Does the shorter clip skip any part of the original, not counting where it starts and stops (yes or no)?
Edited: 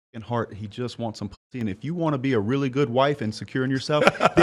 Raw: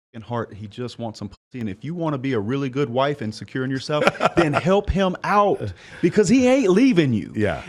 no